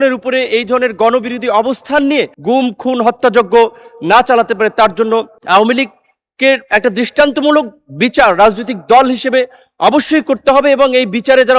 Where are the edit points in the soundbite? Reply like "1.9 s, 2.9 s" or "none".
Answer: 2.3 s, 5.4 s

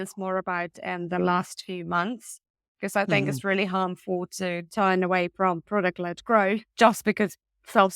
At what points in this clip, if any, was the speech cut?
6.7 s

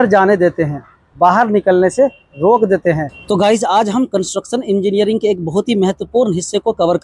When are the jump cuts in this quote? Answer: 3.1 s

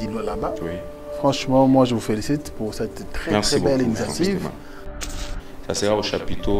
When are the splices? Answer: 5.1 s

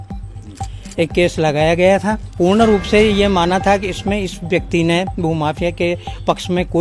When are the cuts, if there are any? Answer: 2.2 s

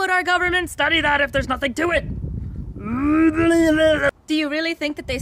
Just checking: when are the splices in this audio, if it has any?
4.1 s

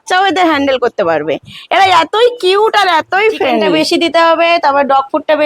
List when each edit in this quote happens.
3.8 s

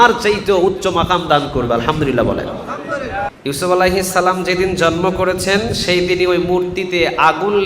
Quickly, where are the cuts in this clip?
3.3 s

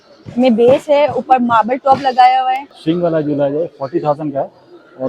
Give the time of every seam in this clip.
2.7 s

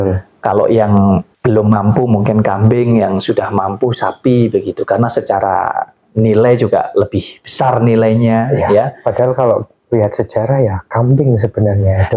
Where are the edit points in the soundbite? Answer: none

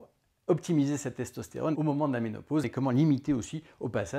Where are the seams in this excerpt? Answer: 1.7 s, 2.6 s

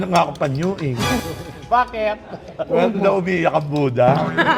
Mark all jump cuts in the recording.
1.2 s

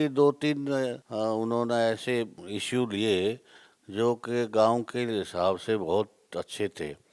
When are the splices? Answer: 1.0 s, 2.4 s

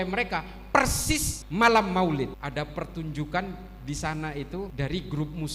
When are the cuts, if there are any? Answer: 1.4 s, 2.4 s, 4.7 s

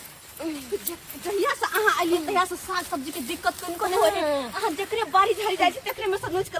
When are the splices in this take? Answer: none

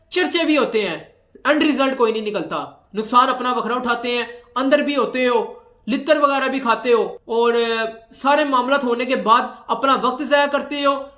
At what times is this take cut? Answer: none

